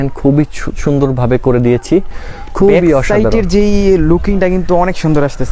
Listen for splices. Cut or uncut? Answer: uncut